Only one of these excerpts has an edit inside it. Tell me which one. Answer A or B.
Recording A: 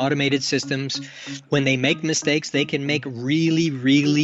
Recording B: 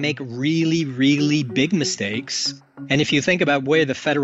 B